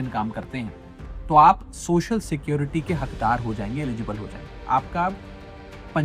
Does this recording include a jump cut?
yes; 1 cut; at 4.5 s

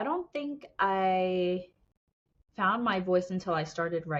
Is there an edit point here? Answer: no; 0 cuts

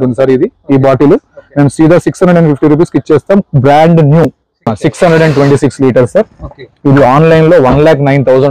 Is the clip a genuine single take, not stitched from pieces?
no; 1 cut; at 4.7 s

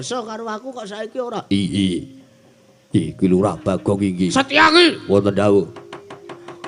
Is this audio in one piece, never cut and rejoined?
no; 1 cut; at 4.3 s

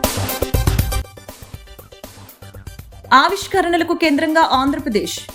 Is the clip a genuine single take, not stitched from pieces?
yes; 0 cuts

